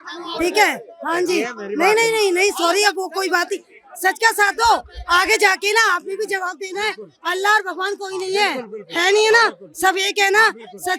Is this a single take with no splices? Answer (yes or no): yes